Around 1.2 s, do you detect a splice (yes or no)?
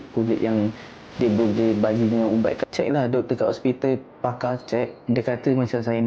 no